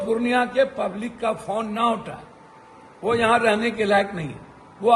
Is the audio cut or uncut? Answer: uncut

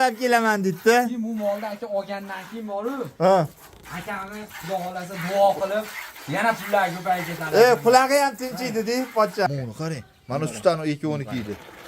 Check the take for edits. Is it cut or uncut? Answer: cut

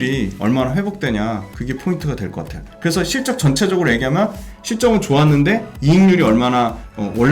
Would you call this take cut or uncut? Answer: cut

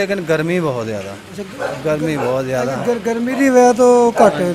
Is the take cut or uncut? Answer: uncut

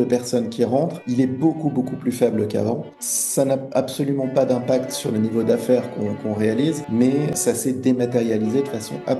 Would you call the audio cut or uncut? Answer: cut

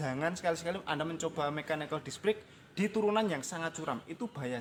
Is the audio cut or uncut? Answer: uncut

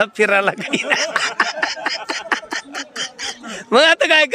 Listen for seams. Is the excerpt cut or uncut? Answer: uncut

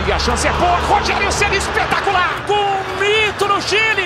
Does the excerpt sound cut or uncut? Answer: cut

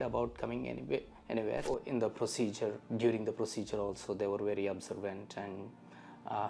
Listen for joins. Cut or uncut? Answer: cut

